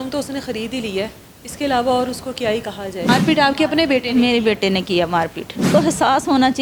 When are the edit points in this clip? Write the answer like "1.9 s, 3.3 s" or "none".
3.1 s, 5.7 s